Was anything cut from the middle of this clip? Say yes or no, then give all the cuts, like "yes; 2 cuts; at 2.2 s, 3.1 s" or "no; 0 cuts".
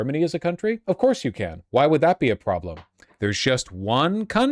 no; 0 cuts